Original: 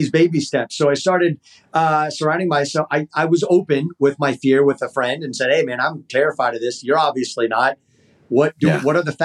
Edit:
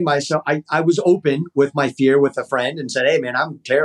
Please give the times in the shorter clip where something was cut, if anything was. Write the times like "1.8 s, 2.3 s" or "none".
none